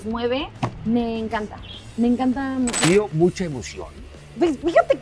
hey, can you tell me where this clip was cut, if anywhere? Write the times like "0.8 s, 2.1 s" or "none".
2.9 s